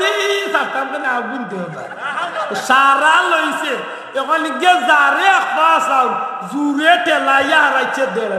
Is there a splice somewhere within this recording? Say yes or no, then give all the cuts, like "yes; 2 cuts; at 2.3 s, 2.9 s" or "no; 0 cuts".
no; 0 cuts